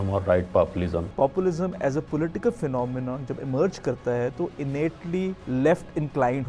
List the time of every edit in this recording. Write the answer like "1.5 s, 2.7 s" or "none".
1.1 s, 5.4 s